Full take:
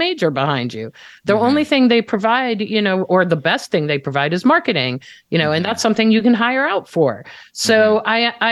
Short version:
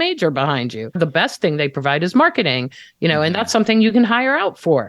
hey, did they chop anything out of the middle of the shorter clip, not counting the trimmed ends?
yes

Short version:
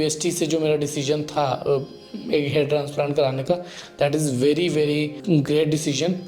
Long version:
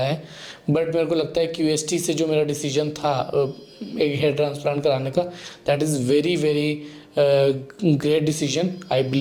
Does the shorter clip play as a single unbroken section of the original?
no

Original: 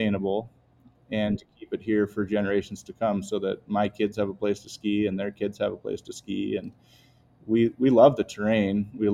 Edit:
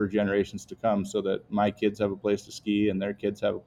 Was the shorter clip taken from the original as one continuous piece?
yes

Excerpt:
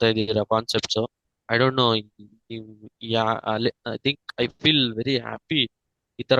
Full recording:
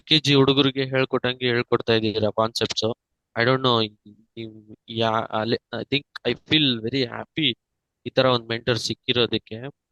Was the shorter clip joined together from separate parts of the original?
no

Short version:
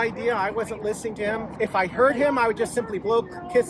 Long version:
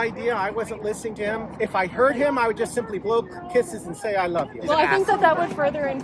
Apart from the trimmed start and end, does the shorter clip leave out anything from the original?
no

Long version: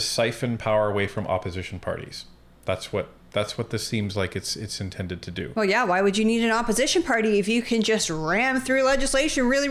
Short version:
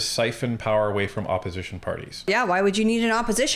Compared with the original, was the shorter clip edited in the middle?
yes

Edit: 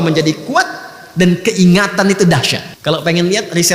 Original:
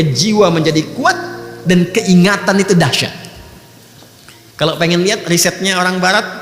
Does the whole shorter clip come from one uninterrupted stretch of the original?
no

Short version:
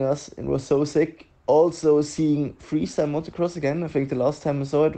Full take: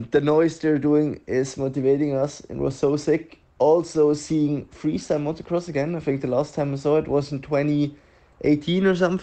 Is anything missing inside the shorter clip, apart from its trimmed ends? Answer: no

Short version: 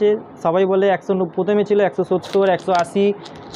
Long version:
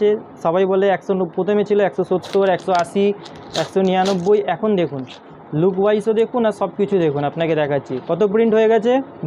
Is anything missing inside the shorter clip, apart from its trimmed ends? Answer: no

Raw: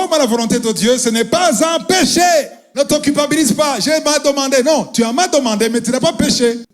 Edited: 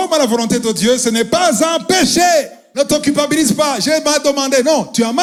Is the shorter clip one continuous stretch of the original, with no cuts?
yes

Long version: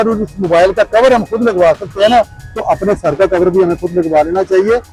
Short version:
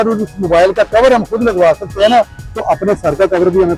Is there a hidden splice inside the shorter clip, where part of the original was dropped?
no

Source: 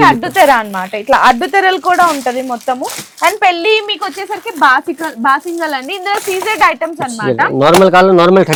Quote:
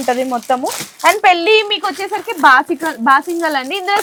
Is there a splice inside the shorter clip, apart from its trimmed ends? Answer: no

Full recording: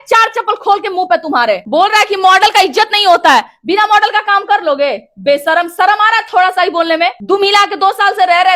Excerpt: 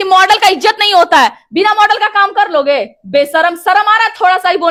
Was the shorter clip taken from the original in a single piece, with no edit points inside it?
yes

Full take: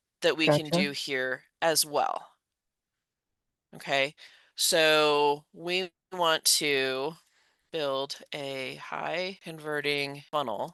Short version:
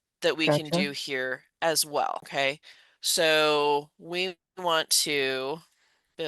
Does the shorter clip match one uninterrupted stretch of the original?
no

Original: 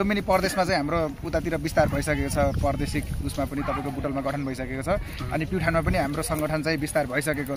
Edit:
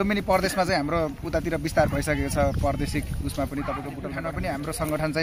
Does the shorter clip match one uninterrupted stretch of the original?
no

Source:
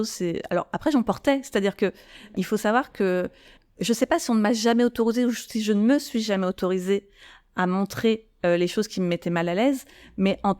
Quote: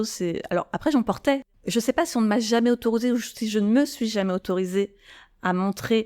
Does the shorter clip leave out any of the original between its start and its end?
yes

